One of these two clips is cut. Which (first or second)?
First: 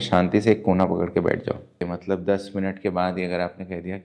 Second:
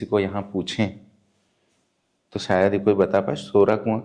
first